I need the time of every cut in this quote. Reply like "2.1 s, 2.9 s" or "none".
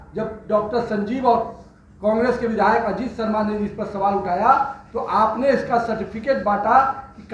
none